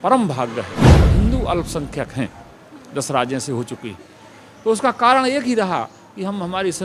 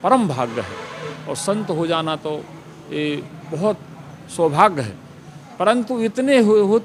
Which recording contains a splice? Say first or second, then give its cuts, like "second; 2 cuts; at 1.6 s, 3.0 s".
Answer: first; 1 cut; at 1.0 s